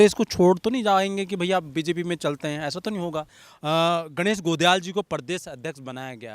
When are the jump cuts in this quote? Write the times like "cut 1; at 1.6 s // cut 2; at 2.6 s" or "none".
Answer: cut 1; at 3.3 s